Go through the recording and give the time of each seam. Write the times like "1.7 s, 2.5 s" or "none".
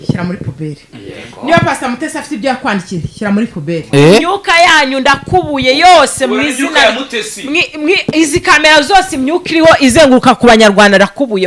3.9 s